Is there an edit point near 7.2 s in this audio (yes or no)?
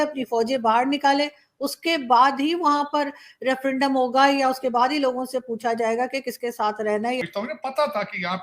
yes